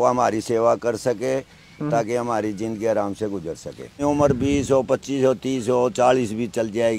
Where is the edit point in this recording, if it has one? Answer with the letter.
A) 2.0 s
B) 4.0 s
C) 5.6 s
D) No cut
B